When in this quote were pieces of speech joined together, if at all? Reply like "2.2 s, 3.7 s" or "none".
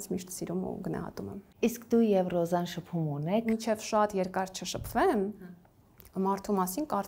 1.4 s, 3.4 s